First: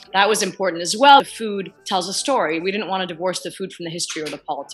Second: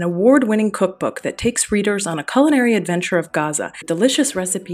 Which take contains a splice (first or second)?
second